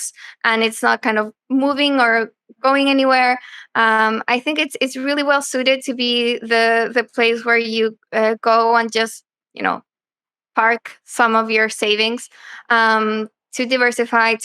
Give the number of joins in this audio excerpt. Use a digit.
0